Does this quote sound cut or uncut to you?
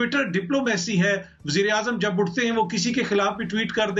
uncut